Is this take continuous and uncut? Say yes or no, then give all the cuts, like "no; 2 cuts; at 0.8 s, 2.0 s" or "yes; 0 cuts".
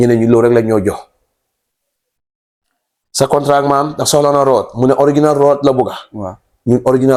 yes; 0 cuts